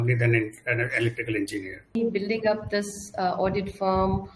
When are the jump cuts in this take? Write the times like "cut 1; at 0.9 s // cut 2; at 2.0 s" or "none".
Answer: cut 1; at 2.0 s